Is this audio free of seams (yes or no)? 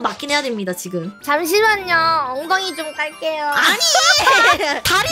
yes